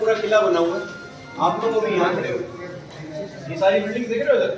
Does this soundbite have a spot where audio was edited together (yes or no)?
no